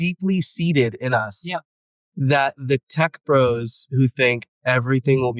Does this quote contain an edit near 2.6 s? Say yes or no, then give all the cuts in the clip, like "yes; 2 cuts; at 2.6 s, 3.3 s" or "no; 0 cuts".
no; 0 cuts